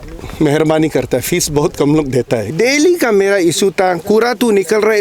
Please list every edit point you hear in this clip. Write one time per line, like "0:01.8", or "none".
0:02.4